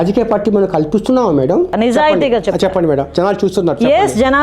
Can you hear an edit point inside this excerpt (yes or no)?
yes